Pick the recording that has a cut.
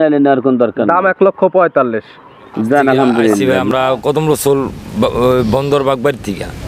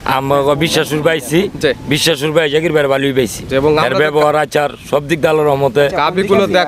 first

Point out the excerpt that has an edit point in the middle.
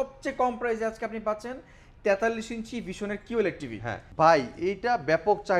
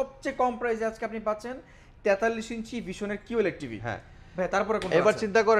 first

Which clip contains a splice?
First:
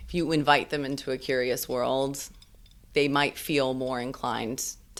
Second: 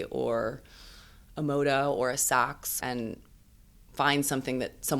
second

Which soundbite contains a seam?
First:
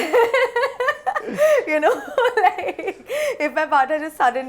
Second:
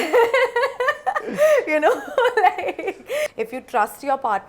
second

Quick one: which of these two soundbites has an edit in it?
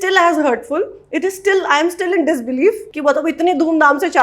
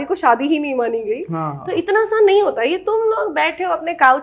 first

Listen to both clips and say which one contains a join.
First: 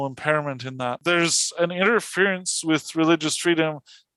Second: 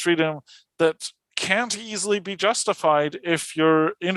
first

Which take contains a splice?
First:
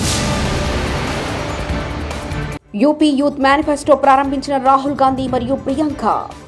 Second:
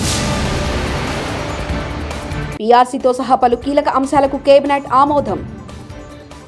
first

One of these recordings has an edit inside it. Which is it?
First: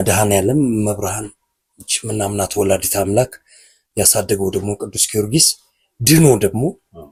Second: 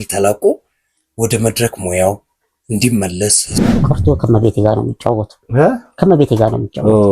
second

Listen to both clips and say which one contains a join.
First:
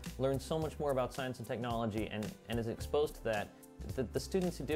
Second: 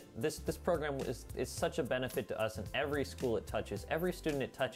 first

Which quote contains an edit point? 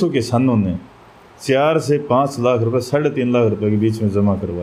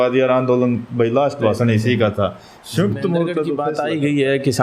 second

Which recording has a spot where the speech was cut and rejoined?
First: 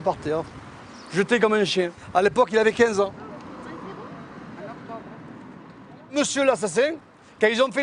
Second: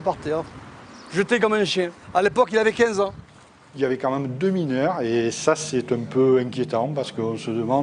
second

